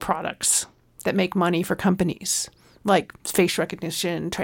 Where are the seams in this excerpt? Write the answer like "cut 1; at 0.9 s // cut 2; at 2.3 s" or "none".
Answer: cut 1; at 3.2 s

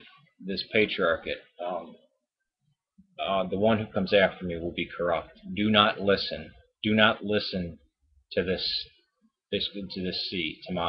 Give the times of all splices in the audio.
none

